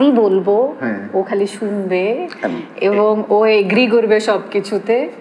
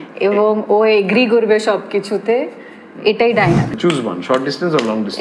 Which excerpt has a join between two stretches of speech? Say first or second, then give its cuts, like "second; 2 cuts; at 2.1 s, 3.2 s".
second; 1 cut; at 3.8 s